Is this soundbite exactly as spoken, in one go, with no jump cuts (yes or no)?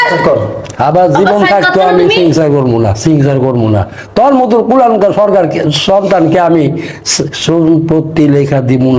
yes